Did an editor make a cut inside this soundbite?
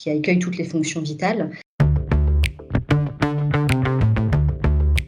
yes; 1 cut; at 1.6 s

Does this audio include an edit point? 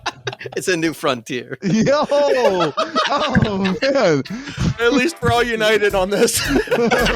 no; 0 cuts

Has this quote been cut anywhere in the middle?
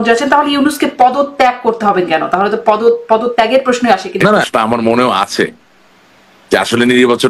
yes; 1 cut; at 4.5 s

